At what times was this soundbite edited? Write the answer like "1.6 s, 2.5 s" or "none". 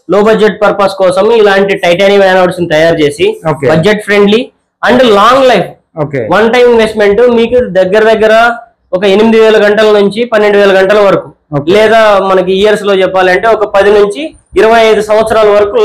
none